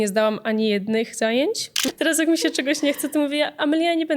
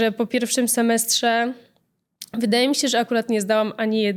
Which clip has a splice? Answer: first; 1 cut; at 1.8 s

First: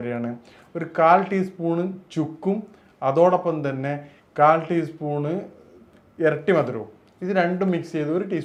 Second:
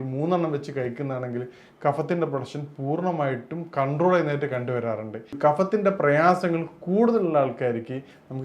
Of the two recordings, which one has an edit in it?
second; 1 cut; at 5.3 s

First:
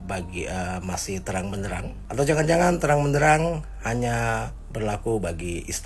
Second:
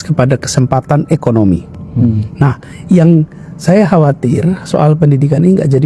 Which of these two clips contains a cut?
first; 2 cuts; at 2.0 s, 4.6 s

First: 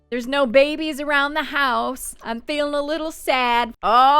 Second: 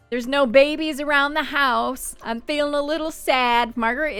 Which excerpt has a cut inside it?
first; 1 cut; at 3.3 s

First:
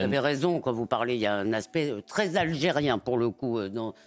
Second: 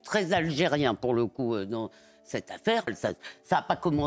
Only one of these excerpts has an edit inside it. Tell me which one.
second; 1 cut; at 2.9 s

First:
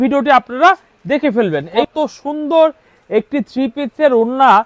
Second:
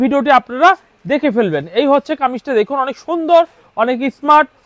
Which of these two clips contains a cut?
first; 1 cut; at 1.8 s

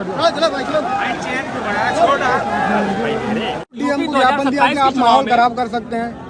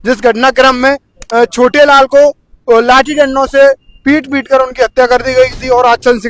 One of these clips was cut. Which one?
first; 1 cut; at 3.7 s

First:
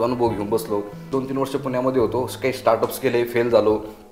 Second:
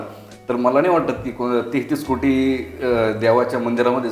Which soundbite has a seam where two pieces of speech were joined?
first; 1 cut; at 1.0 s

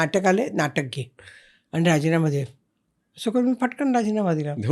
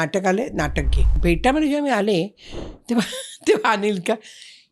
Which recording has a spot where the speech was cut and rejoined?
second; 1 cut; at 1.0 s

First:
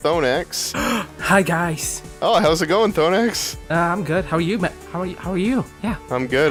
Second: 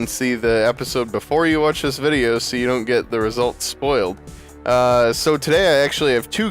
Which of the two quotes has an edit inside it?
second; 1 cut; at 3.7 s

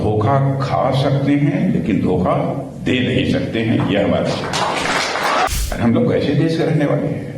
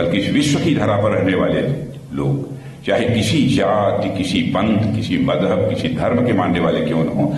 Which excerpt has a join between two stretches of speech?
first; 1 cut; at 5.5 s

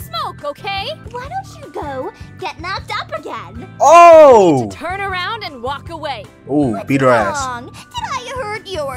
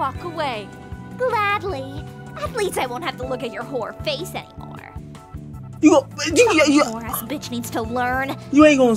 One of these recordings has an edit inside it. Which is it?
first; 1 cut; at 1.0 s

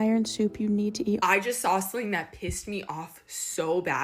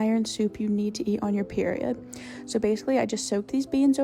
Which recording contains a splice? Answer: first; 1 cut; at 1.2 s

